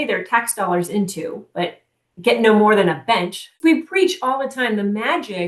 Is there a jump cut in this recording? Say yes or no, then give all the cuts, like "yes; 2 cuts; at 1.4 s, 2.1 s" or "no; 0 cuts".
yes; 1 cut; at 3.5 s